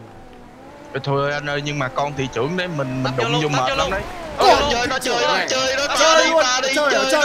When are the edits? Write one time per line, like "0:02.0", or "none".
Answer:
none